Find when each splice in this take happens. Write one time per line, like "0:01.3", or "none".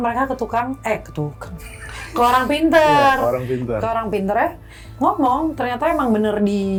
none